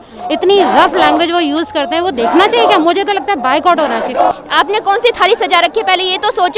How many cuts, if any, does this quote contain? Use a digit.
1